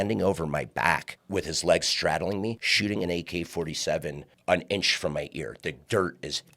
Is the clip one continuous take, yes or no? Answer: no